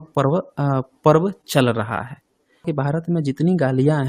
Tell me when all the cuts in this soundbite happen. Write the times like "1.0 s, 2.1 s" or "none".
2.7 s